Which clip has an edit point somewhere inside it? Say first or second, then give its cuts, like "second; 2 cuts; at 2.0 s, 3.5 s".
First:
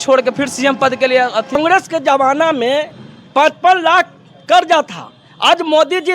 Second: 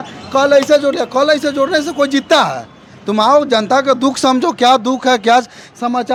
first; 1 cut; at 1.6 s